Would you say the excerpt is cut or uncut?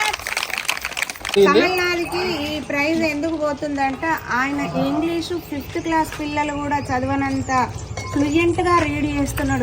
cut